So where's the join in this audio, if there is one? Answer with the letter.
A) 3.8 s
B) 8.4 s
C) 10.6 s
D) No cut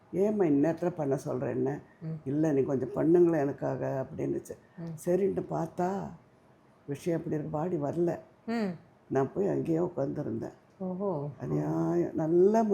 C